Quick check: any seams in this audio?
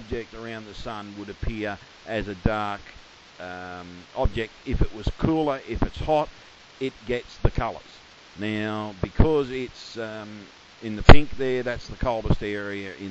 yes; 1 cut; at 7.5 s

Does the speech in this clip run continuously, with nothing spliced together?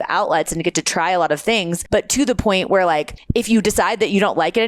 no; 2 cuts; at 1.8 s, 3.2 s

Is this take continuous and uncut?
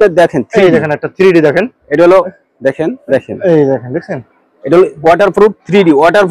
no; 1 cut; at 3.0 s

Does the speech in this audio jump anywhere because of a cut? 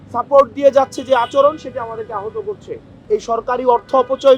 yes; 1 cut; at 3.0 s

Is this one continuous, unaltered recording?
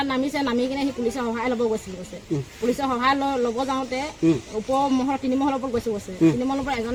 yes; 0 cuts

